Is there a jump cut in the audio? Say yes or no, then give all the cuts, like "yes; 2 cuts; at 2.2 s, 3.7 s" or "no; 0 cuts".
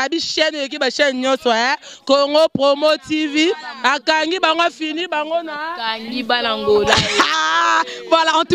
no; 0 cuts